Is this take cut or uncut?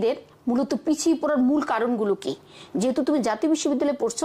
uncut